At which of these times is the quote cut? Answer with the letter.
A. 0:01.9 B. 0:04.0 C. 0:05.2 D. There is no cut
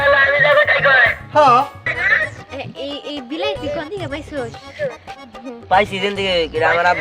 A